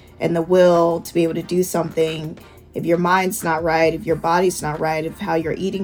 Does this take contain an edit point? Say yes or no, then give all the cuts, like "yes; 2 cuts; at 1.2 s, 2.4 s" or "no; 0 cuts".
yes; 1 cut; at 4.0 s